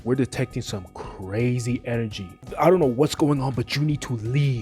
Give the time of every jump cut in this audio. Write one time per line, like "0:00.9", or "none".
0:02.5